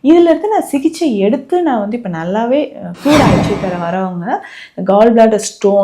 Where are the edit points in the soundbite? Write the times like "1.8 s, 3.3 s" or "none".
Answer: 3.4 s